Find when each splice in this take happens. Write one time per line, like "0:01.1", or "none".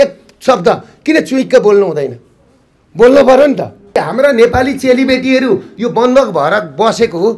0:03.9

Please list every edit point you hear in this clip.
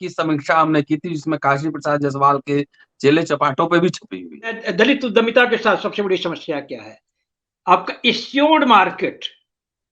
0:04.6

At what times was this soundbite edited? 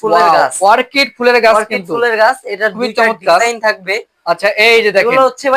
none

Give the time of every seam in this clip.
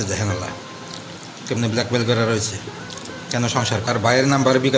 0:03.9

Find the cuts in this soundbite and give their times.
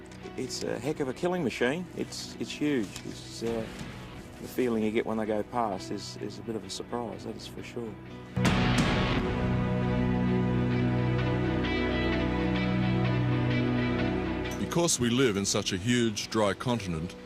0:04.2

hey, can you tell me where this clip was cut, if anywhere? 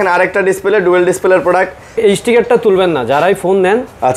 0:02.0

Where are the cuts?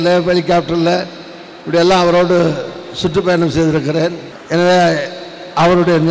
0:04.3

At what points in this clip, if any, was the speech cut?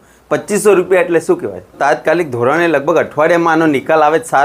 0:01.8

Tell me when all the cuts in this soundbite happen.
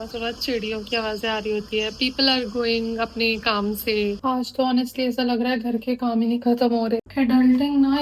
0:04.2
0:07.1

